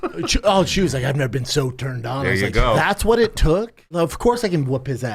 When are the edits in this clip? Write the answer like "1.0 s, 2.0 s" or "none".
4.0 s